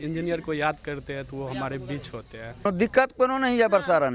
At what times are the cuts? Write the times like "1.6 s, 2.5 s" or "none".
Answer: 2.7 s